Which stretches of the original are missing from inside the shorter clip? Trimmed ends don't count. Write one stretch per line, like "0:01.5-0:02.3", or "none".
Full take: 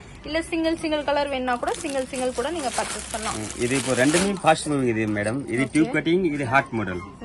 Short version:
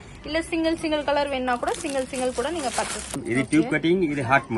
0:03.2-0:05.4